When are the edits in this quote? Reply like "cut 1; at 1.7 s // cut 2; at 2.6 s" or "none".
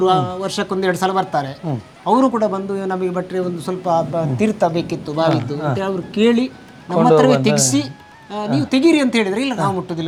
none